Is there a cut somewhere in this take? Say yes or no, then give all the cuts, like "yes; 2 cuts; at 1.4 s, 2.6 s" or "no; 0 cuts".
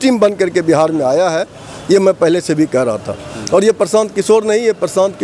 no; 0 cuts